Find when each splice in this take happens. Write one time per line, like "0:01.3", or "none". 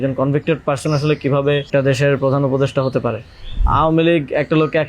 0:01.7
0:03.6